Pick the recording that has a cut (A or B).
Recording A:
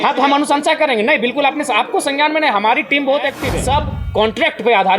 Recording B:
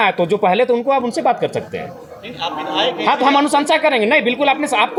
A